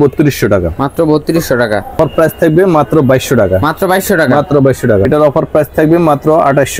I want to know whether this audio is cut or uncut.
cut